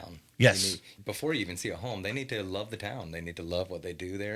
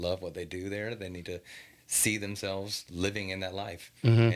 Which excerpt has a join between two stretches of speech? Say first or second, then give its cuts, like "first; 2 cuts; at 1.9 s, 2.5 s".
first; 1 cut; at 0.9 s